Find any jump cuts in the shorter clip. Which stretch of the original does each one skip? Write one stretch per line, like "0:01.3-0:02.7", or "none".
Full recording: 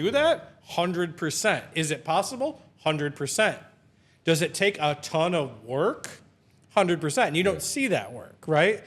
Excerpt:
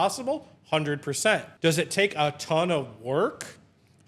0:03.6-0:04.1

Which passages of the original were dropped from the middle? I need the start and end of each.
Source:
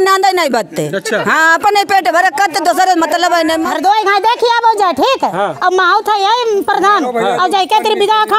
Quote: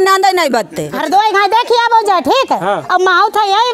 0:01.0-0:03.7

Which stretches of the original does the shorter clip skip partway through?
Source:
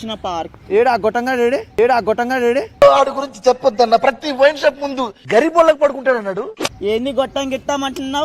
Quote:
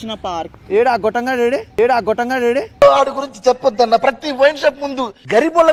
none

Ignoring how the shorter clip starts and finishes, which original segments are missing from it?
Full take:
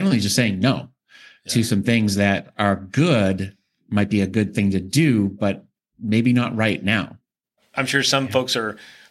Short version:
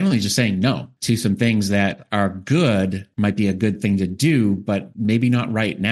0:00.9-0:01.4
0:03.5-0:03.8
0:05.6-0:05.9

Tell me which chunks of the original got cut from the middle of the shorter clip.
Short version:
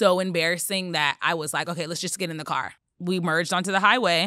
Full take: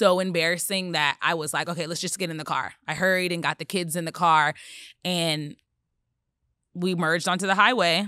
0:02.8-0:06.5

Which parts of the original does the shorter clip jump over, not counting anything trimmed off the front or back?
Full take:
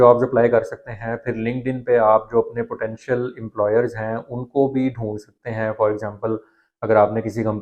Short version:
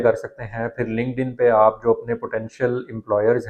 none

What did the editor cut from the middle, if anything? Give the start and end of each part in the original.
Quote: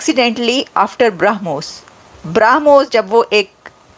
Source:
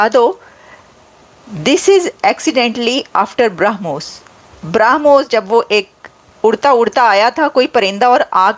none

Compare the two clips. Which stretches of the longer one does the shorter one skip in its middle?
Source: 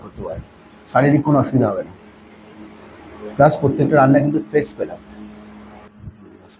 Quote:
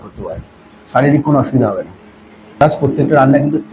0:02.6-0:03.4

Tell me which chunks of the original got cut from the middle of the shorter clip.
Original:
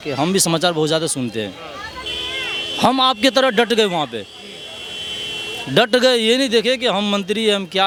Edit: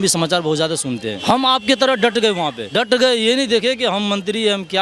0:01.5-0:02.7
0:04.2-0:05.7

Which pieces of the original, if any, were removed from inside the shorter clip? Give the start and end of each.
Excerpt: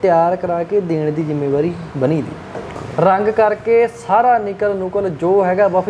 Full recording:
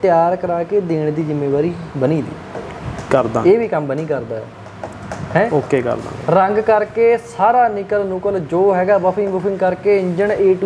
0:02.8-0:06.1

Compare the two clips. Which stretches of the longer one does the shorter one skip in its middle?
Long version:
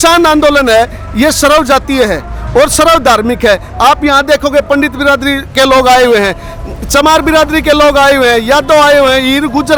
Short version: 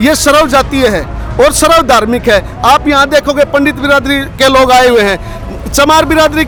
none

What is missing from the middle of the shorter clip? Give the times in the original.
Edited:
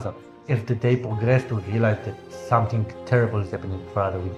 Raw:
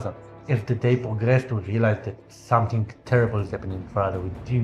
none

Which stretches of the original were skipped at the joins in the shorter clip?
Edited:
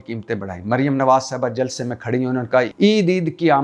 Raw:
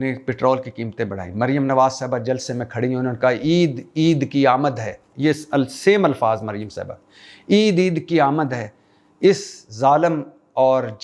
0:03.4-0:07.4

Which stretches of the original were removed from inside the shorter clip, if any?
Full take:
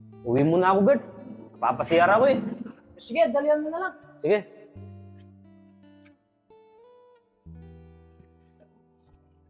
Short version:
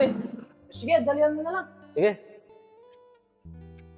0:04.7-0:06.4

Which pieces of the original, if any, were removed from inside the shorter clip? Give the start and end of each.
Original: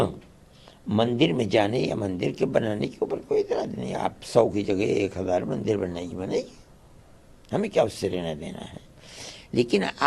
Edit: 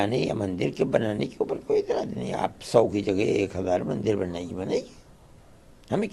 none

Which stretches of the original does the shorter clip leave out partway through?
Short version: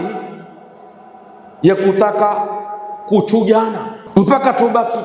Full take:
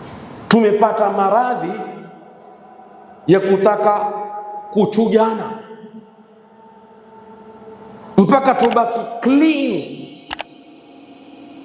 0:05.6-0:07.9

